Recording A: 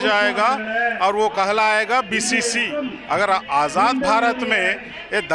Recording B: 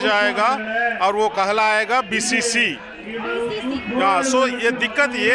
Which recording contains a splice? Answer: A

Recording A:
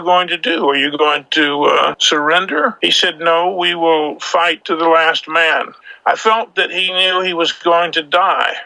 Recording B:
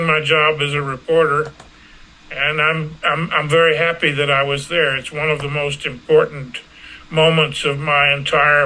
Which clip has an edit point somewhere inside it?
A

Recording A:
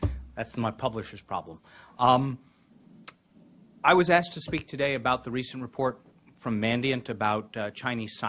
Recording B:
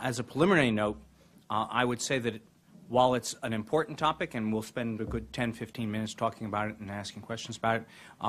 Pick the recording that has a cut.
B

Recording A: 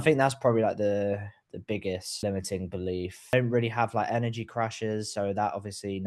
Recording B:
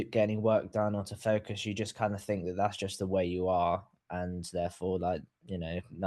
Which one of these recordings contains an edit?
A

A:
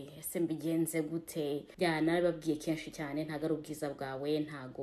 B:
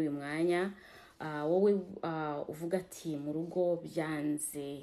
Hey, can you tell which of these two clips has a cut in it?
A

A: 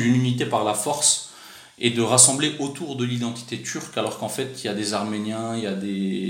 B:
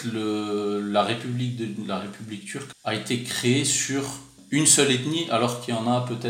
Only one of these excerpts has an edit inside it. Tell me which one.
B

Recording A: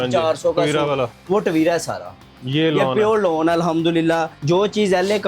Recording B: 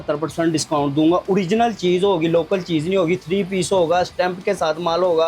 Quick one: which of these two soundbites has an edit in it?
A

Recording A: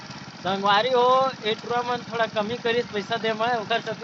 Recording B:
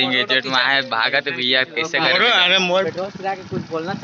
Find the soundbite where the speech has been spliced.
B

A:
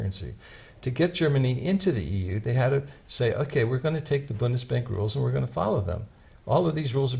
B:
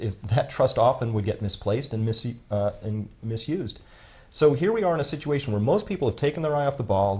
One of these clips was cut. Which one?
A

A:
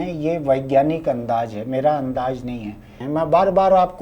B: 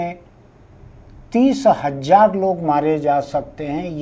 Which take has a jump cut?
A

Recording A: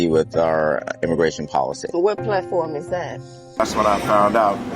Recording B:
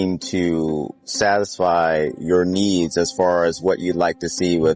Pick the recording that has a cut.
A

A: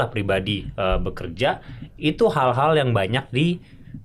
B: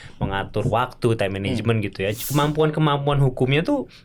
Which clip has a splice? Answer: B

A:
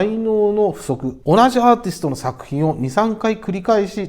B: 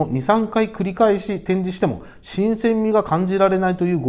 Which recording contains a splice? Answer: A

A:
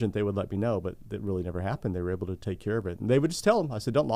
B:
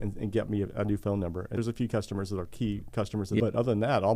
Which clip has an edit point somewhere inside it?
B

